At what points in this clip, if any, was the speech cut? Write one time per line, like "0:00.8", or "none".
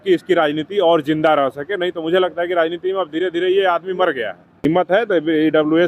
0:04.6